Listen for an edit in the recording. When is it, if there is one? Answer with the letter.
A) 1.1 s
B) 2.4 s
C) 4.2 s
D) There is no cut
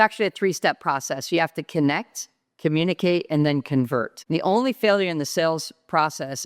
C